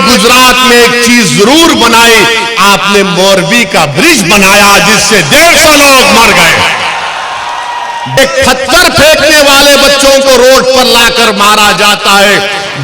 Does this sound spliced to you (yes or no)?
yes